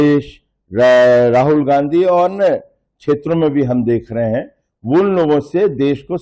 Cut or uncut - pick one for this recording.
uncut